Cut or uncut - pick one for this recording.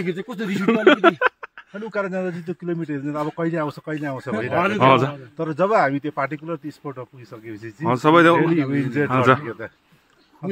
uncut